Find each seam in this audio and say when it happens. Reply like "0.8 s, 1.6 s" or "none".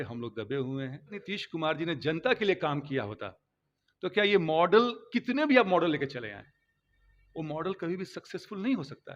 1.2 s